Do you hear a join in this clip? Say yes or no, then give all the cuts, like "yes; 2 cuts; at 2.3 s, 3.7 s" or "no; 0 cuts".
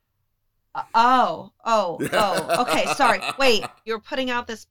yes; 1 cut; at 3.7 s